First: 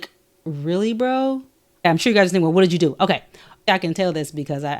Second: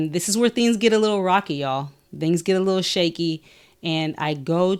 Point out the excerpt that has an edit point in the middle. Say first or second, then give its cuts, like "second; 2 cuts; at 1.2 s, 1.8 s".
first; 2 cuts; at 1.9 s, 3.6 s